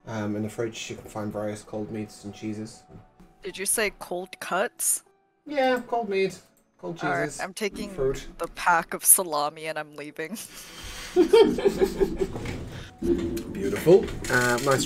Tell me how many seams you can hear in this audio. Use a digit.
1